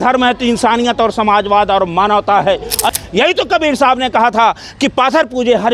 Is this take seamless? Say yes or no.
no